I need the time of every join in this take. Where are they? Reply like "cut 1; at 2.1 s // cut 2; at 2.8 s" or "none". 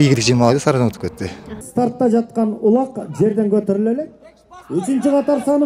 cut 1; at 1.6 s